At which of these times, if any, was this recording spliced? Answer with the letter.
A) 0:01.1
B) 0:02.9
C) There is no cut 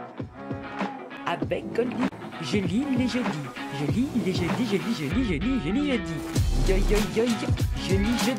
A